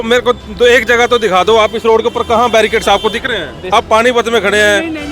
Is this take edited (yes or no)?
yes